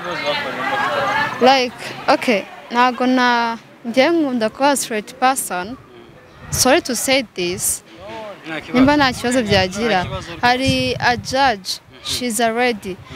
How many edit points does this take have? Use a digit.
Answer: 0